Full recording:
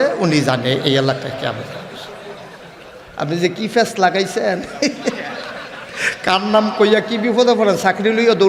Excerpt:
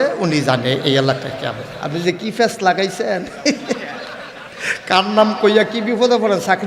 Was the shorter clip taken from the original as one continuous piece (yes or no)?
no